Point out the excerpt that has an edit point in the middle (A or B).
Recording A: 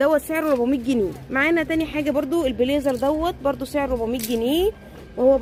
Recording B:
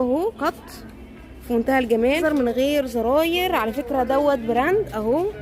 B